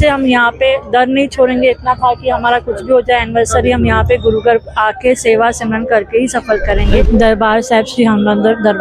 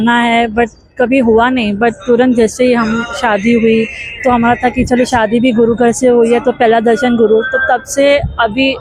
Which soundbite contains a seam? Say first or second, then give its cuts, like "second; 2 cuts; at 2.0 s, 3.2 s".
first; 1 cut; at 7.0 s